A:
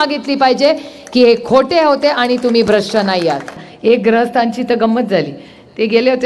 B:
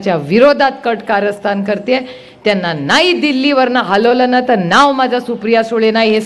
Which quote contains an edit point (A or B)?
A